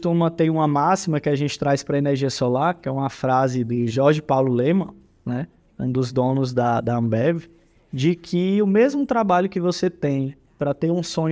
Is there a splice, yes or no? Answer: no